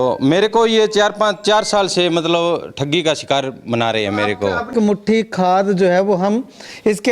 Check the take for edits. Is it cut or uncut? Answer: cut